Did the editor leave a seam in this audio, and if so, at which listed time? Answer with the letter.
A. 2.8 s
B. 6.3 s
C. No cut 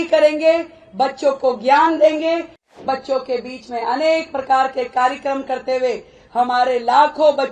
A